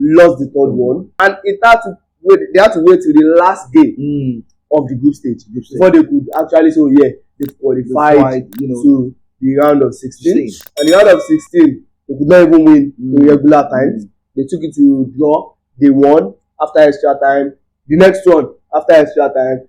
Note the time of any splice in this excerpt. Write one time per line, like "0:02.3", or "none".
0:01.1